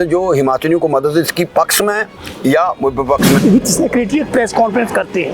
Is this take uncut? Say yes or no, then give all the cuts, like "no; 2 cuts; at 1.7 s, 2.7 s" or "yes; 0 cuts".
no; 1 cut; at 3.4 s